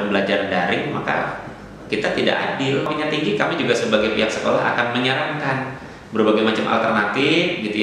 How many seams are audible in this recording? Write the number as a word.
one